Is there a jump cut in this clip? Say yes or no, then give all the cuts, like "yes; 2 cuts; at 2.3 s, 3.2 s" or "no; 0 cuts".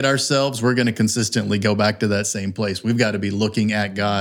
no; 0 cuts